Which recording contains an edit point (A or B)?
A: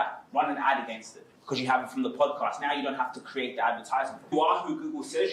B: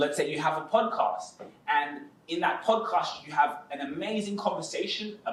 A